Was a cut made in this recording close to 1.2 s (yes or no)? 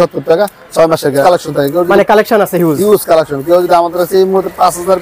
yes